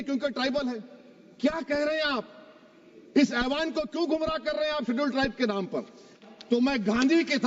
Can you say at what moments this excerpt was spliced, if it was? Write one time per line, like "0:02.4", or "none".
0:06.2

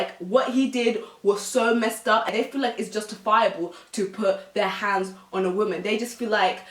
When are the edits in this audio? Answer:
0:02.3

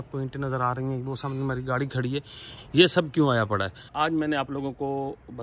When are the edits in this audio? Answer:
0:03.8

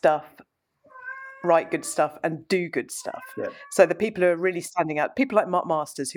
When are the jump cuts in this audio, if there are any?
none

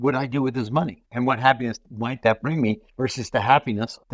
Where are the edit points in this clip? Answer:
0:01.0
0:02.9

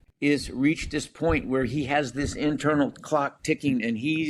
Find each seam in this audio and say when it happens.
none

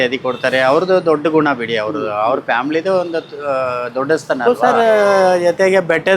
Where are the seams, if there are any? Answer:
0:04.4

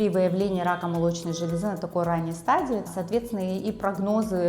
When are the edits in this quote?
0:02.9

